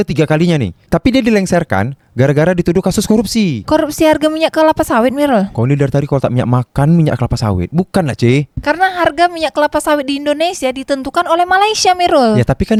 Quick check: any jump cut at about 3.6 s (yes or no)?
no